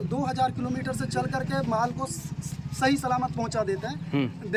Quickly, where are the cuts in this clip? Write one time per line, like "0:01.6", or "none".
none